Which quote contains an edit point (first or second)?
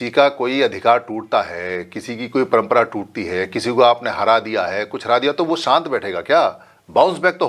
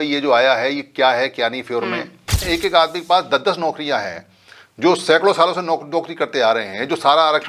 second